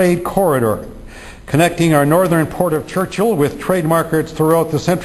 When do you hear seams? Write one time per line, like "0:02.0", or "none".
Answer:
0:01.0